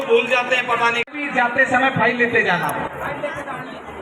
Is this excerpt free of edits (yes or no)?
no